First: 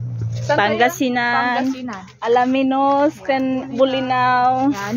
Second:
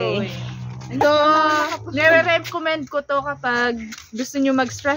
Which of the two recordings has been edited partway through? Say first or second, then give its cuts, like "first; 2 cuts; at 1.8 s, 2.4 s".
second; 1 cut; at 1.0 s